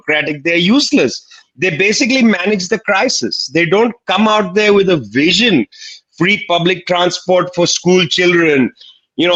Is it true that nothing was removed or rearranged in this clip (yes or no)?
yes